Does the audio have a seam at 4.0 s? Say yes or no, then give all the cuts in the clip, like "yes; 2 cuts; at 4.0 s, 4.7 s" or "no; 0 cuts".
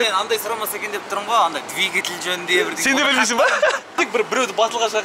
yes; 1 cut; at 4.0 s